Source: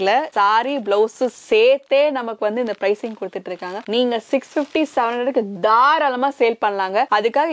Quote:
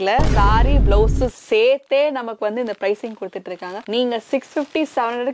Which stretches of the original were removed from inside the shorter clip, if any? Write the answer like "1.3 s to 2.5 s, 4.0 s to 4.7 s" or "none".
none